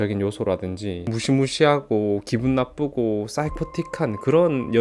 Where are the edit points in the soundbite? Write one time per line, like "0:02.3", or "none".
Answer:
none

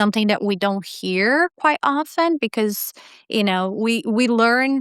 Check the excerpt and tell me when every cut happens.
none

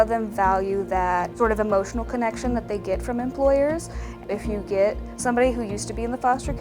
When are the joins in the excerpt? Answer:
0:01.3
0:04.2

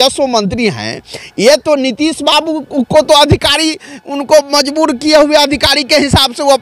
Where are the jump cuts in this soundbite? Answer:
none

